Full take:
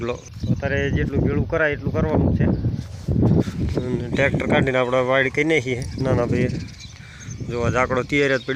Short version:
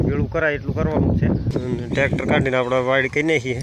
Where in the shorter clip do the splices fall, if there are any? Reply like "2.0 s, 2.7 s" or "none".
1.5 s